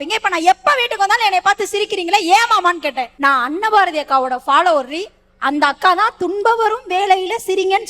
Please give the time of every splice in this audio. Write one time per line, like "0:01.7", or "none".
0:03.1